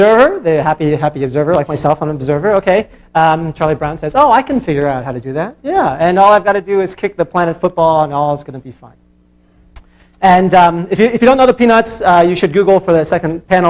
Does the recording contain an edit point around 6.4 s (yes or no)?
yes